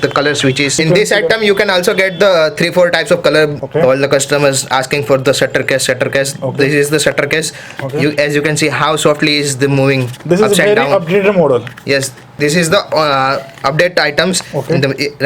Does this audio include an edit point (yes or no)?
yes